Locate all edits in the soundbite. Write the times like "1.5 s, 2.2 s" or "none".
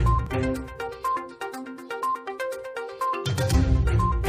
none